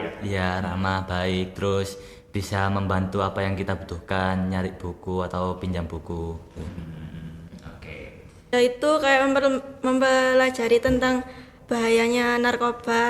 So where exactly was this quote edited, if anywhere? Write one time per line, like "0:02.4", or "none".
0:08.5